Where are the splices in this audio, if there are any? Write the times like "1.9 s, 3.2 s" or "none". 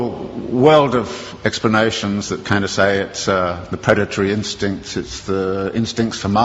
2.3 s

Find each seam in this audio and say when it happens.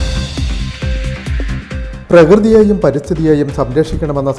1.7 s

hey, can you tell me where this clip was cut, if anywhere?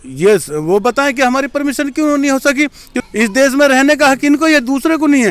2.9 s

